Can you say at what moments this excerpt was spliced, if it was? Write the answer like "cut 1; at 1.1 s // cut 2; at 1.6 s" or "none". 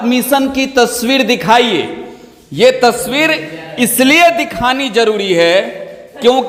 none